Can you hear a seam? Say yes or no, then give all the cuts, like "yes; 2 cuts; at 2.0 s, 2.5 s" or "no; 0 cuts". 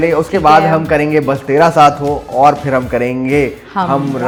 no; 0 cuts